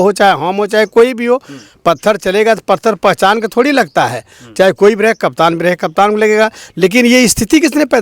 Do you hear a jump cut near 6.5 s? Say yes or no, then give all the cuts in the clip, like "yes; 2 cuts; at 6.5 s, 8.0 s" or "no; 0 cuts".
no; 0 cuts